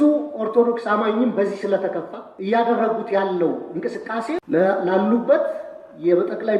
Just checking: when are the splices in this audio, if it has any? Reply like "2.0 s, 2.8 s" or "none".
2.3 s, 4.4 s

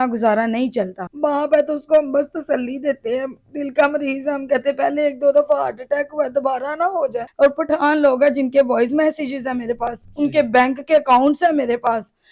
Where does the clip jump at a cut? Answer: 1.0 s, 7.2 s

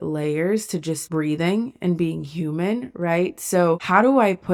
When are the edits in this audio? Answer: none

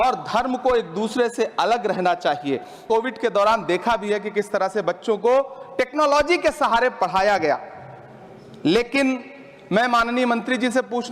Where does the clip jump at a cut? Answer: 2.8 s

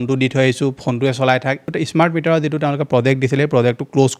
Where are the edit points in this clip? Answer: 1.6 s

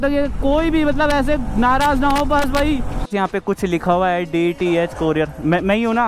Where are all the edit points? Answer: 3.1 s

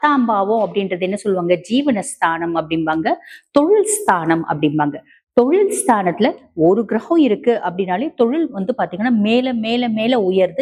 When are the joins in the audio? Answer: none

